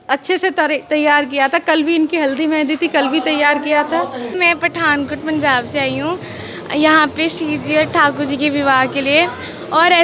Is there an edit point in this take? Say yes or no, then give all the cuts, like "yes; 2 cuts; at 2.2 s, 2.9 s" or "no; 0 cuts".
yes; 1 cut; at 4.4 s